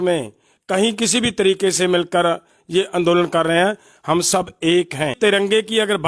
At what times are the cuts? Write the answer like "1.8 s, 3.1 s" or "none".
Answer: 5.2 s

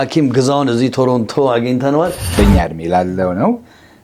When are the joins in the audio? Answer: 2.2 s

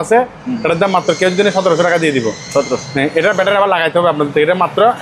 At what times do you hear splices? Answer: none

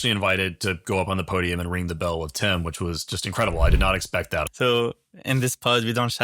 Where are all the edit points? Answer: 4.5 s

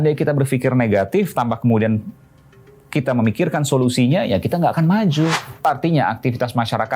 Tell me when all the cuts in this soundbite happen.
5.7 s

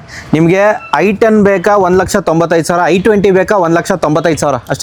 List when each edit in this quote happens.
none

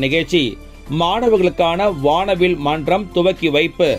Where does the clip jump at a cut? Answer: none

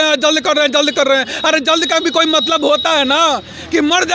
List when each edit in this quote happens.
none

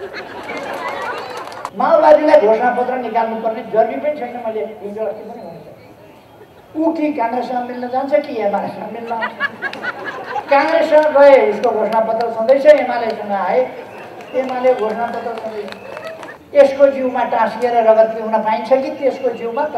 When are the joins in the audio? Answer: 1.7 s, 16.3 s

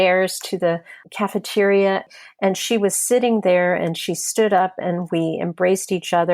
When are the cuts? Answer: 1.0 s, 2.1 s

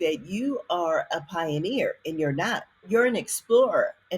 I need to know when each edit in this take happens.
2.8 s

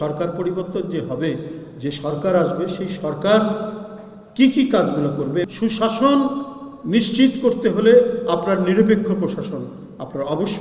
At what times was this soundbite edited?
5.5 s

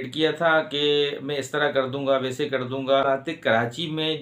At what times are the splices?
3.0 s

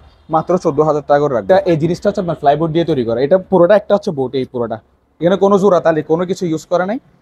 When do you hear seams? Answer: 1.4 s

